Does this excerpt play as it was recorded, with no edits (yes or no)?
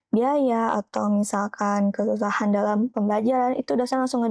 yes